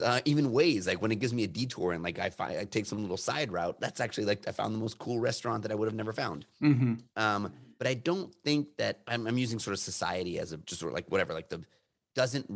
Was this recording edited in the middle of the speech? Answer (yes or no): yes